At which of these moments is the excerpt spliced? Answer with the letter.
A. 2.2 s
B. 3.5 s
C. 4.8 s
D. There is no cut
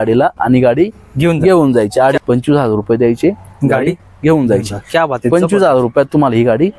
A